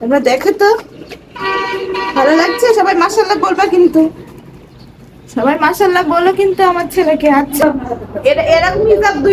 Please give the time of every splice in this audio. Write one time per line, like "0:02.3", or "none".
0:07.6